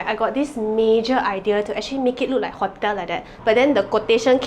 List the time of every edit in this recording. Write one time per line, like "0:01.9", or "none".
0:03.2